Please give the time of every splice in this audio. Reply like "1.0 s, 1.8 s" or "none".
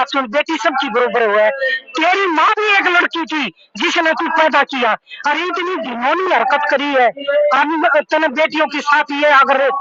none